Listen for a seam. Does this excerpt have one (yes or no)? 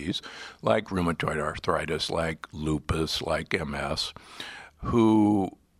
yes